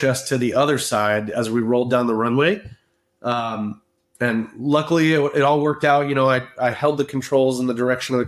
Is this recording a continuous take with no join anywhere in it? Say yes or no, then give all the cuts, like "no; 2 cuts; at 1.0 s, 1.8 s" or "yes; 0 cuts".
yes; 0 cuts